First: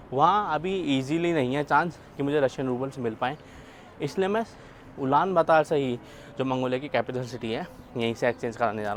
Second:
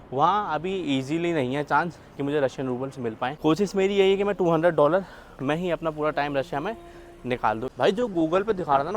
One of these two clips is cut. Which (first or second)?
second